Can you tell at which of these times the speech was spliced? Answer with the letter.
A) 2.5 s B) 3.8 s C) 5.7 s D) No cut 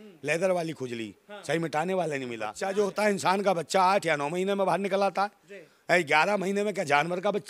A